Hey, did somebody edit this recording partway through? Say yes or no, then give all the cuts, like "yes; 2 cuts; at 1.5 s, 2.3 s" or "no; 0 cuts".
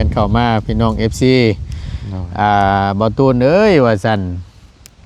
no; 0 cuts